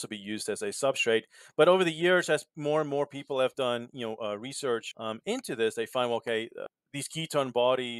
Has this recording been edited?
no; 0 cuts

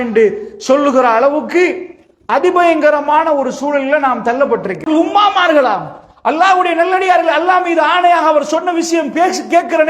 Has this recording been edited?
yes; 1 cut; at 4.9 s

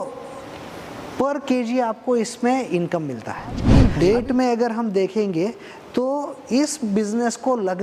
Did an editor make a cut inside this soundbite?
yes; 1 cut; at 3.6 s

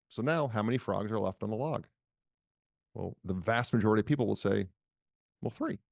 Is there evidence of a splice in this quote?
no; 0 cuts

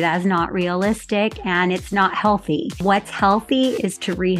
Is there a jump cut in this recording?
yes; 1 cut; at 2.8 s

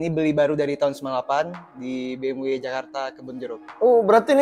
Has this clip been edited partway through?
no; 0 cuts

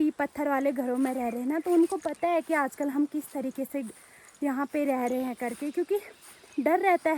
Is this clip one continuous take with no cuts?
yes; 0 cuts

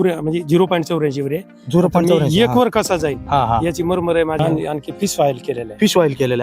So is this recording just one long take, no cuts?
no; 1 cut; at 4.4 s

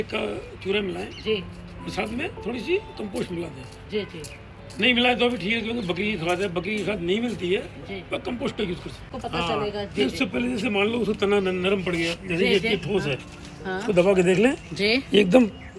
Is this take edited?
yes; 1 cut; at 9.1 s

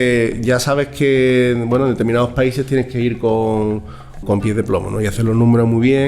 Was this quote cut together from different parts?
yes; 1 cut; at 4.2 s

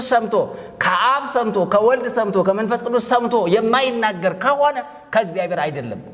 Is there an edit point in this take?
no; 0 cuts

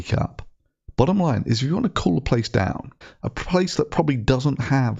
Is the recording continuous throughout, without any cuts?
yes; 0 cuts

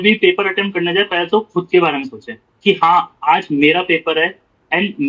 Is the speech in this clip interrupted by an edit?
no; 0 cuts

